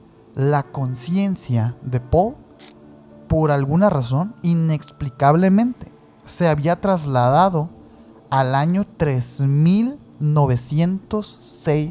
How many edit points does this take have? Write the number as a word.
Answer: zero